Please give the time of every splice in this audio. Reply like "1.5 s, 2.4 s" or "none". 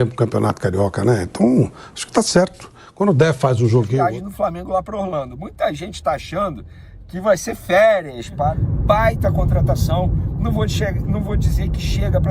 3.9 s, 8.6 s